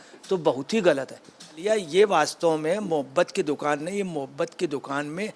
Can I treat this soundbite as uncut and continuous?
no; 1 cut; at 1.6 s

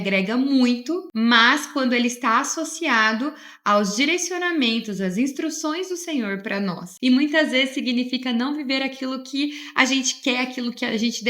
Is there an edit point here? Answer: yes; 2 cuts; at 1.1 s, 6.9 s

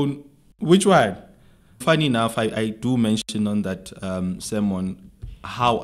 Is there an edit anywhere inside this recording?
yes; 1 cut; at 1.8 s

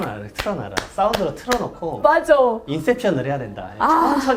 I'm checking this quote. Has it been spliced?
no; 0 cuts

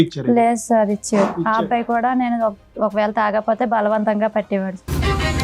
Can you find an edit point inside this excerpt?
no; 0 cuts

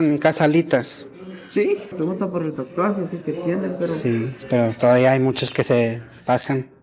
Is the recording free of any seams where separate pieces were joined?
no; 1 cut; at 1.9 s

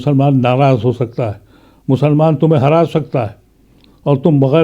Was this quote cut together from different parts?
no; 0 cuts

